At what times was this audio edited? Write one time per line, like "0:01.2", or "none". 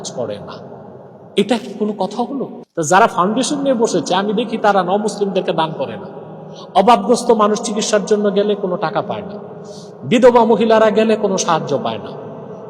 0:02.6

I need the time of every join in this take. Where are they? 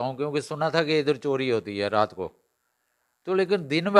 none

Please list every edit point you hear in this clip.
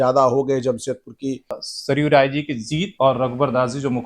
0:01.7

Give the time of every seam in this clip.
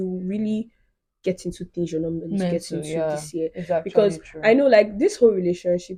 none

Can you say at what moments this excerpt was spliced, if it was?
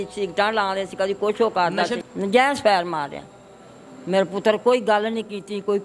0:02.0

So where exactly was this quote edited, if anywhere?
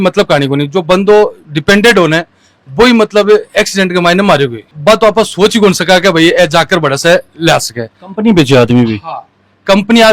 none

